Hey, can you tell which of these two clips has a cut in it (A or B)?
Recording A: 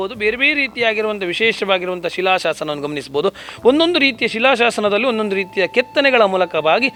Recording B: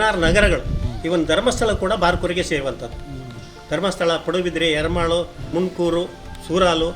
B